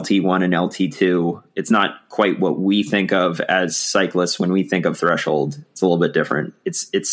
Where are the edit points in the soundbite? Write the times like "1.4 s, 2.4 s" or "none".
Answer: none

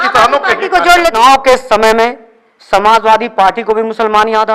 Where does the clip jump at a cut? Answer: 1.1 s

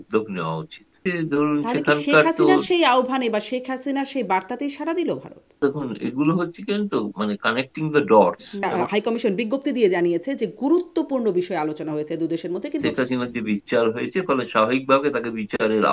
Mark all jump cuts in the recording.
1.0 s, 5.6 s, 8.7 s, 12.8 s

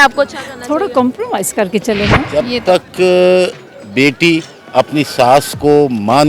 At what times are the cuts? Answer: 2.3 s

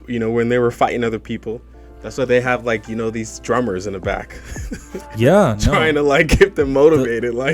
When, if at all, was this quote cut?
none

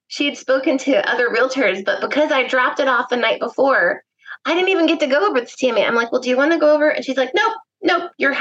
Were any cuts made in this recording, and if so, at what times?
none

